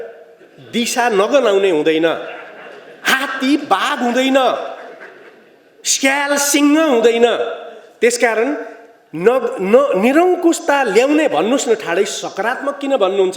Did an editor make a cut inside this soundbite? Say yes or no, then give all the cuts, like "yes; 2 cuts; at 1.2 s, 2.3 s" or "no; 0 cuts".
no; 0 cuts